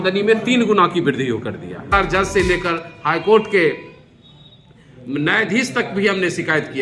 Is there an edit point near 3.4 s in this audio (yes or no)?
no